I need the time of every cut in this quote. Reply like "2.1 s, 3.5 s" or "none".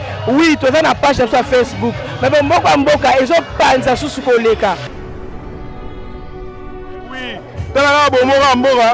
4.9 s, 6.5 s